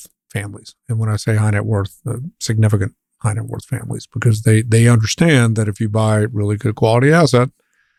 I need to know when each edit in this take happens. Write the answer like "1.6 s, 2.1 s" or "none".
none